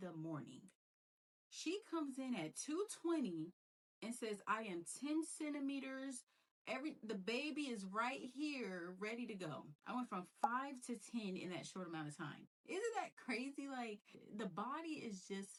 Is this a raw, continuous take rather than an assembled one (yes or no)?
yes